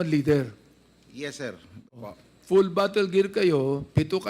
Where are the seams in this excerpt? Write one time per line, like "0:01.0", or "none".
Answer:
0:01.9

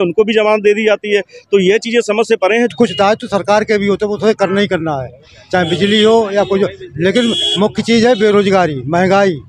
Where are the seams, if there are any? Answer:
0:02.7

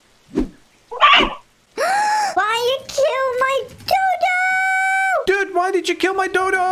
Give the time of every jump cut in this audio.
none

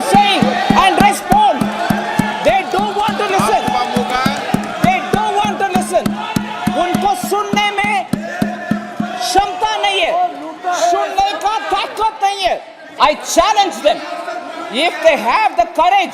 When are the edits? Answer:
0:12.8

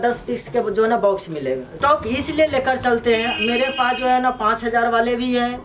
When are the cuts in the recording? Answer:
0:01.8

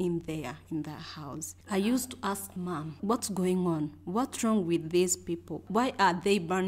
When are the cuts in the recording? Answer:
0:01.5
0:03.0
0:05.6

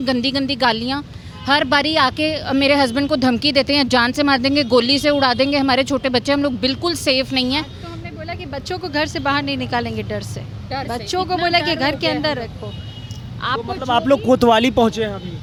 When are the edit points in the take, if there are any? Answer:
none

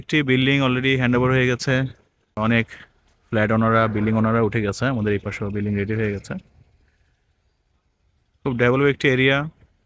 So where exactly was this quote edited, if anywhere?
0:02.4

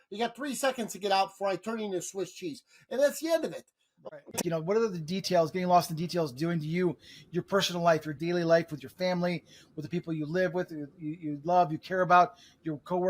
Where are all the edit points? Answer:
0:04.2
0:08.1

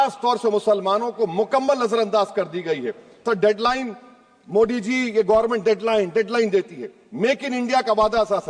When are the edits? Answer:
0:03.2

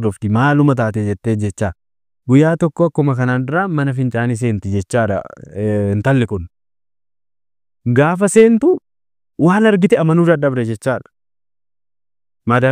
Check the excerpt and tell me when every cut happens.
none

